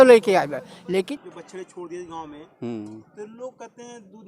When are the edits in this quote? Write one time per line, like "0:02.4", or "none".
0:01.1

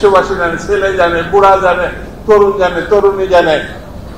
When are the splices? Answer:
none

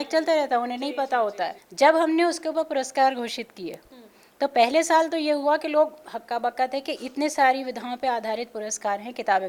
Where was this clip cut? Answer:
0:01.6

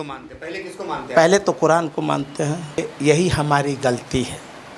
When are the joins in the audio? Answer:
0:02.9

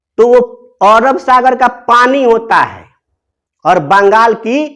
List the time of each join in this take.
none

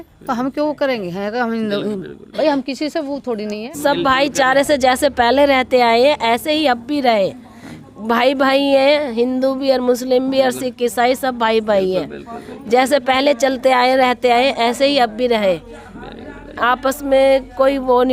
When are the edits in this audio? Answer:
0:03.6

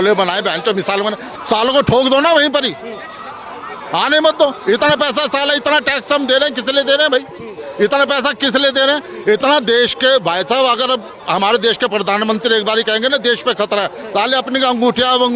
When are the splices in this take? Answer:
none

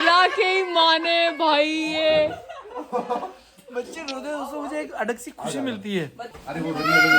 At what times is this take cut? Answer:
0:06.2

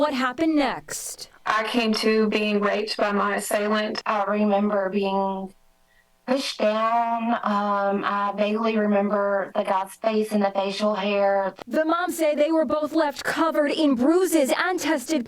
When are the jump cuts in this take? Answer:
0:04.3
0:10.7

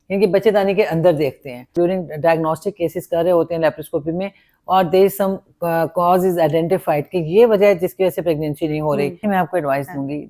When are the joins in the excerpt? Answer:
0:01.7
0:09.2

